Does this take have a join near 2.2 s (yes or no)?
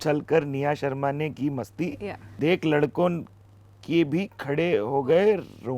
yes